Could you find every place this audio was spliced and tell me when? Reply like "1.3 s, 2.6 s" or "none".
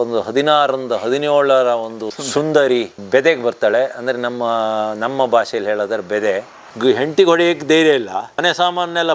6.6 s, 8.3 s